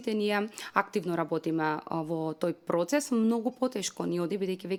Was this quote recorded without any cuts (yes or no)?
yes